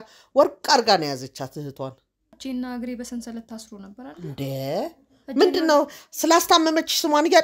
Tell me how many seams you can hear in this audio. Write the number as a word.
one